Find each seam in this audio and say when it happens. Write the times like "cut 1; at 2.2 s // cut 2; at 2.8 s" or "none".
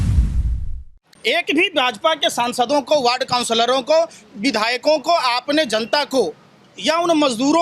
cut 1; at 0.9 s